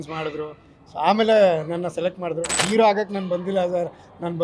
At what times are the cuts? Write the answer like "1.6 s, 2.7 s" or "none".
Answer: 2.7 s